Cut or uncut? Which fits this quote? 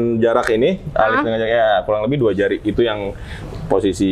uncut